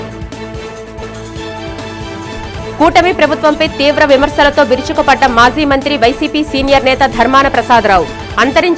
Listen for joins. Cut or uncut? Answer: cut